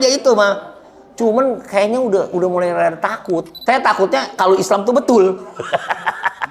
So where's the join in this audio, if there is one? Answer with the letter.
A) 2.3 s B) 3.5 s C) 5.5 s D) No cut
B